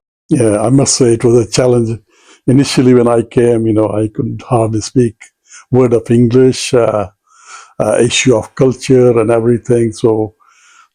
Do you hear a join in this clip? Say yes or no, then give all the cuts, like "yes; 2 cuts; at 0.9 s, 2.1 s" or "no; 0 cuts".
no; 0 cuts